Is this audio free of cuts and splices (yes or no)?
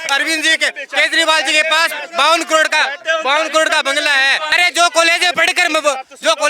no